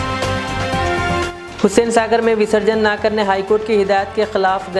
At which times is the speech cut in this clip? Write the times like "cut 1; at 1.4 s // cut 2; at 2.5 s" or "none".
cut 1; at 1.3 s